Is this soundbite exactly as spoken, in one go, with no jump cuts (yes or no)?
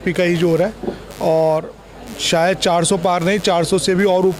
yes